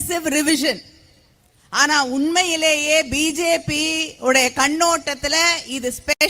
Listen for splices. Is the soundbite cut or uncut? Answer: uncut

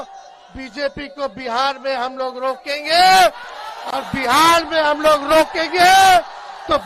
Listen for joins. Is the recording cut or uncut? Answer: uncut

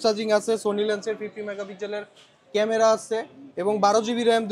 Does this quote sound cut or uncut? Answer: uncut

